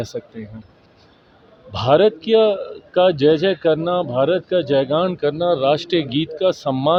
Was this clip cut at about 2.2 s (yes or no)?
no